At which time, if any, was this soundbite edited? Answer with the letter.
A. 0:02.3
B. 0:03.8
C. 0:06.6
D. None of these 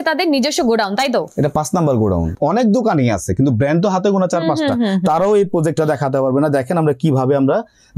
A